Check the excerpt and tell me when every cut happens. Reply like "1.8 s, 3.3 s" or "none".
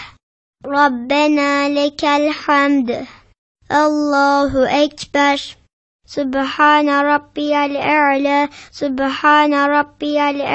3.3 s, 6.0 s, 8.6 s